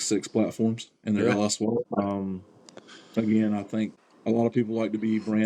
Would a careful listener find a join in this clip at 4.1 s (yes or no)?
yes